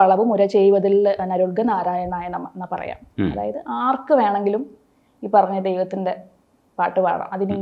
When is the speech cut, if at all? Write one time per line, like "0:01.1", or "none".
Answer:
none